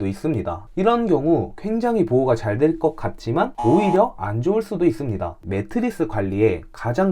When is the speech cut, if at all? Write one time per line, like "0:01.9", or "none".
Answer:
0:05.5

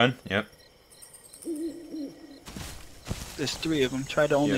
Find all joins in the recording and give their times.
0:03.3

